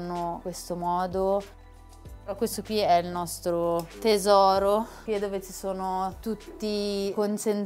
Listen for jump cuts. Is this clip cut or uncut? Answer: uncut